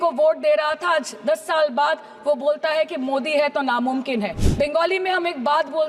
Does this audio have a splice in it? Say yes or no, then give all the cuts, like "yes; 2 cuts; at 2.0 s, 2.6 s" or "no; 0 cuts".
yes; 1 cut; at 4.4 s